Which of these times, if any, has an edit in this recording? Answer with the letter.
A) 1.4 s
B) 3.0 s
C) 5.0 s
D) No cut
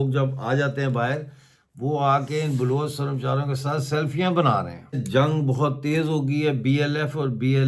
C